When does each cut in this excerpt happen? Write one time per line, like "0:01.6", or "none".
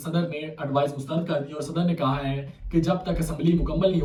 none